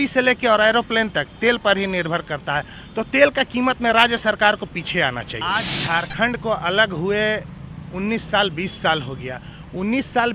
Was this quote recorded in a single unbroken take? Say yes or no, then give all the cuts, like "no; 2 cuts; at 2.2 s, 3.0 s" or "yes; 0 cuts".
no; 1 cut; at 5.4 s